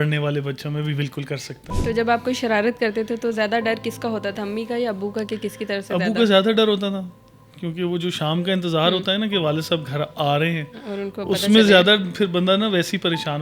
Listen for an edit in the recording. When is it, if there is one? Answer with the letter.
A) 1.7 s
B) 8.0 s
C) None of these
A